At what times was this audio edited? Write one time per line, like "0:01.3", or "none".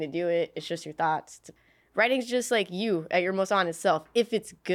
0:01.5

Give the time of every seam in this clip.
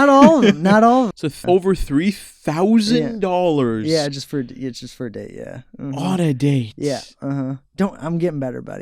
0:01.2

